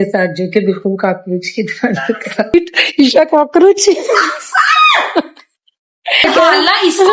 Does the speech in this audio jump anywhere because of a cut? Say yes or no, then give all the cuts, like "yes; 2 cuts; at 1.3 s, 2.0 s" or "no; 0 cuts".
yes; 2 cuts; at 2.5 s, 6.2 s